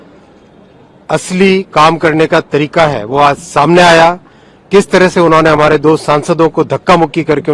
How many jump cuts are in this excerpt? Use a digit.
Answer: 0